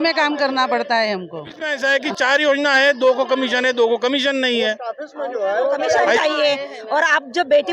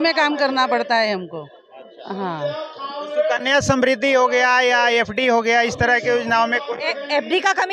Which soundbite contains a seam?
first; 2 cuts; at 1.6 s, 6.1 s

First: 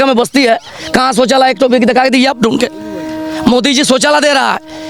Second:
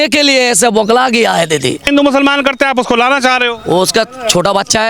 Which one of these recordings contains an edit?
second; 1 cut; at 1.8 s

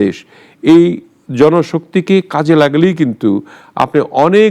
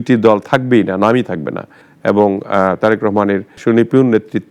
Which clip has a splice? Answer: second; 1 cut; at 1.8 s

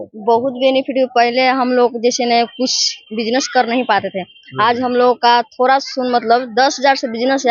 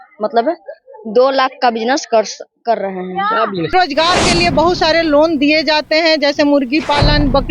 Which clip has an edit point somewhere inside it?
second; 1 cut; at 3.7 s

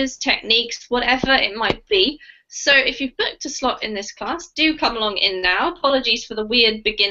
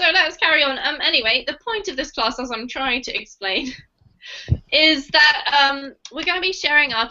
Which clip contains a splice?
second; 1 cut; at 2.4 s

